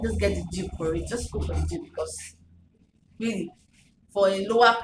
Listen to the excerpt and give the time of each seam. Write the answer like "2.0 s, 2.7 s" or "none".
none